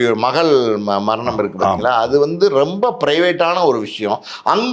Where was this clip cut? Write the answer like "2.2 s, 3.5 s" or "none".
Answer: none